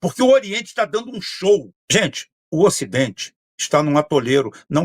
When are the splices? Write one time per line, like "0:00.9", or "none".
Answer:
0:01.8